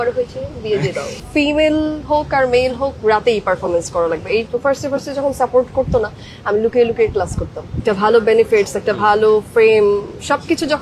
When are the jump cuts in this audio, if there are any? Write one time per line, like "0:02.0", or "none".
0:01.2
0:04.5
0:07.8